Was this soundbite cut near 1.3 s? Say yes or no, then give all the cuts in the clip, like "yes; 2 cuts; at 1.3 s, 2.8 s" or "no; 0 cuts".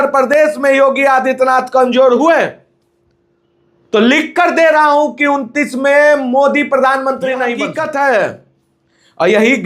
no; 1 cut; at 7.6 s